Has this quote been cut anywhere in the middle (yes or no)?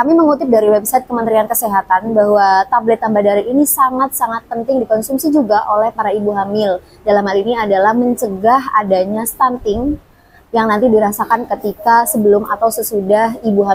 no